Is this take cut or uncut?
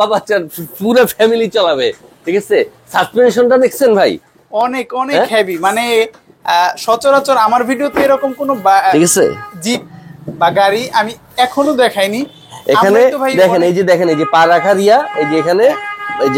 uncut